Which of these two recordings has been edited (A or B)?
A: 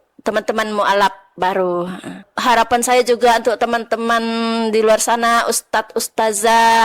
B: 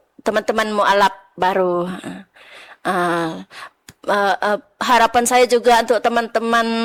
A